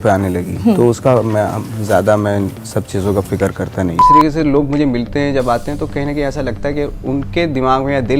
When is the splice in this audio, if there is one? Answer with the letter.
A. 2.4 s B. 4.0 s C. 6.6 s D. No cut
B